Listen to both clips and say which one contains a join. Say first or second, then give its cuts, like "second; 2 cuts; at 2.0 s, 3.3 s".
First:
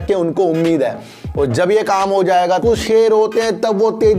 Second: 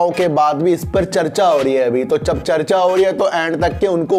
first; 1 cut; at 2.5 s